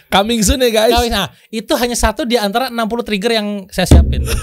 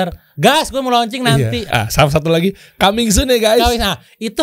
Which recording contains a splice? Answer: second; 1 cut; at 1.6 s

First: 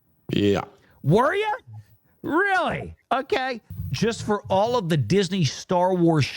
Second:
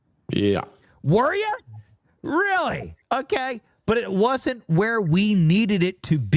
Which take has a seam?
first; 1 cut; at 3.7 s

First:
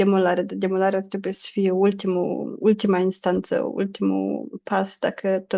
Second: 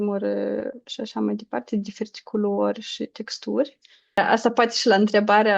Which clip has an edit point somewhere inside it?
second; 1 cut; at 4.2 s

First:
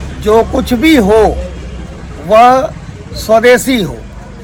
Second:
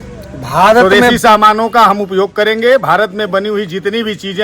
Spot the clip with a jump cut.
second; 1 cut; at 1.2 s

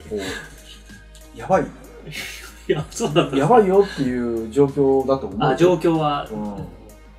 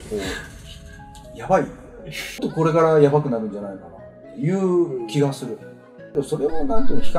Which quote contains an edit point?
second; 2 cuts; at 2.4 s, 6.1 s

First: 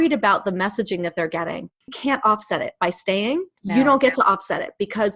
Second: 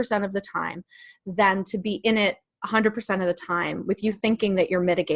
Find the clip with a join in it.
first; 2 cuts; at 2.0 s, 3.6 s

